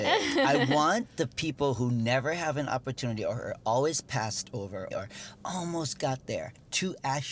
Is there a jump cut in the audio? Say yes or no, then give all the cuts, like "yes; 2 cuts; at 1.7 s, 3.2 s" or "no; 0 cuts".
yes; 1 cut; at 4.9 s